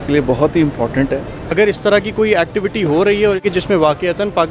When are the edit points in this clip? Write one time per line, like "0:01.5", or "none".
0:01.5
0:03.5